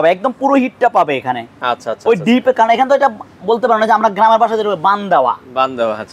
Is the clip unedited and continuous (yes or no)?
yes